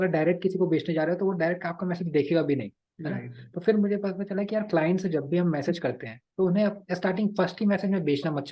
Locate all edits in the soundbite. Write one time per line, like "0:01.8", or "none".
none